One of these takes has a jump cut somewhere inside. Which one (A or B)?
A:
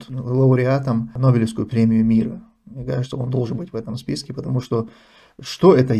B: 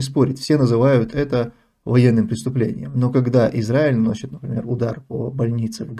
A